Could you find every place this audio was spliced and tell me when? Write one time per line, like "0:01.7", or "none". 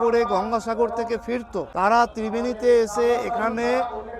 0:01.6